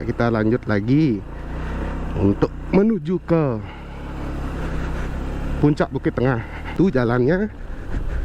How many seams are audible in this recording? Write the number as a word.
one